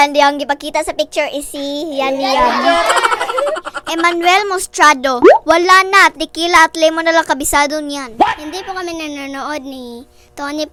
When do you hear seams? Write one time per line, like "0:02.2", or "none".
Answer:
none